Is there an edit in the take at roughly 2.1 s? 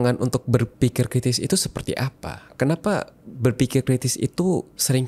no; 0 cuts

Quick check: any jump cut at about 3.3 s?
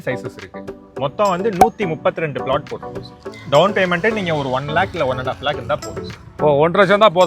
yes; 1 cut; at 3.3 s

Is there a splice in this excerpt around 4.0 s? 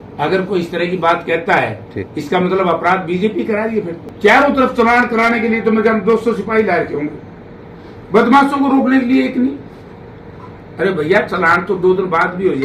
yes; 1 cut; at 4.0 s

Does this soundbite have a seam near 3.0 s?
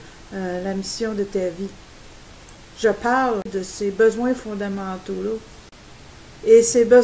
no; 0 cuts

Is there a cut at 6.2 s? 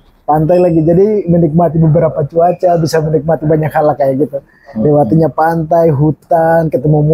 no; 0 cuts

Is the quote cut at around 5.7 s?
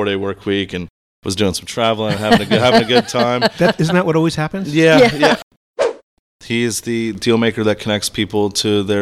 yes; 1 cut; at 5.7 s

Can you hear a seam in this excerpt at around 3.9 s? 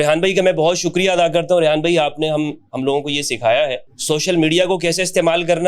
yes; 1 cut; at 3.9 s

